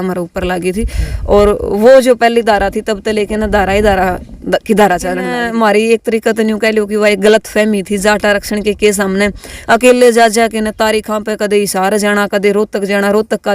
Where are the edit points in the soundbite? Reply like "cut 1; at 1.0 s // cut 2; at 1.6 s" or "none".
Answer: cut 1; at 5.3 s